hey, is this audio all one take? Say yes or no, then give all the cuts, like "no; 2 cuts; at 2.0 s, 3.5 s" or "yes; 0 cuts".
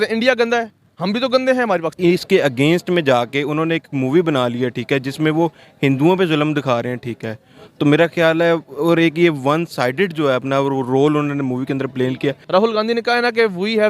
no; 2 cuts; at 1.9 s, 12.4 s